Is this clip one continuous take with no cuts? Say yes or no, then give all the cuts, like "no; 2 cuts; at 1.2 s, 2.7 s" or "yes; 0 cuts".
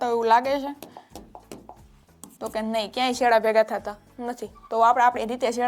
yes; 0 cuts